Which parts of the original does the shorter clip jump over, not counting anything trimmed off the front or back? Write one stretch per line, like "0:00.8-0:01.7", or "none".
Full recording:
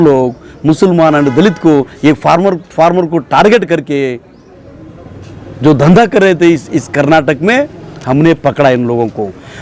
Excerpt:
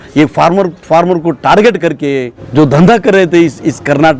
0:04.2-0:05.5